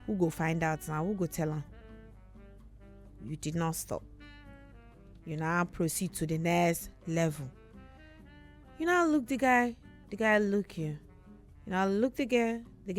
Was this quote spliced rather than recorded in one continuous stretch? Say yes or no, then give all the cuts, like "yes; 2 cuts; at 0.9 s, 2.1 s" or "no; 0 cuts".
no; 0 cuts